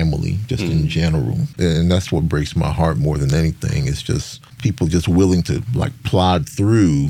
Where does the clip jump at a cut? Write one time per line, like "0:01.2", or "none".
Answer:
0:01.5
0:04.5